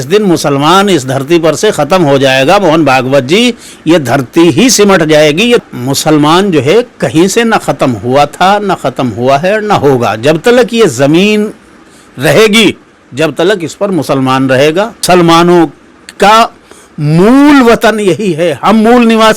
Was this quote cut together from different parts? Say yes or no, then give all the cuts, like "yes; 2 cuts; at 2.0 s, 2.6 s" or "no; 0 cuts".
yes; 2 cuts; at 5.6 s, 15.0 s